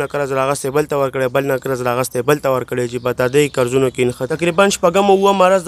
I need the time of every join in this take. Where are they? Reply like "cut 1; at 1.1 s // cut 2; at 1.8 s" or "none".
cut 1; at 4.2 s